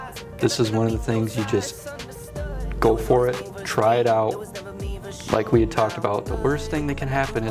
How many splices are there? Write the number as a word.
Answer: zero